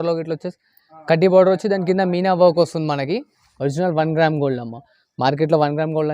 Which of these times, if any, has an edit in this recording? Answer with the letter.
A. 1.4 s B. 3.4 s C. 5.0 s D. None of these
B